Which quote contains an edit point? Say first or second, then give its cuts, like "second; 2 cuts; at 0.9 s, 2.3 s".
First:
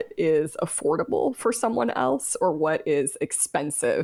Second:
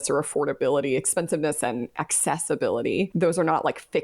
second; 1 cut; at 3.1 s